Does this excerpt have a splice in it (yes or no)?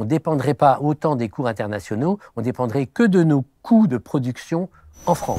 no